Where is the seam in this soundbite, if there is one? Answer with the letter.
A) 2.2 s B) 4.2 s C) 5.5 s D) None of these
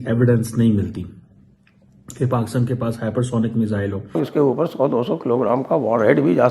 B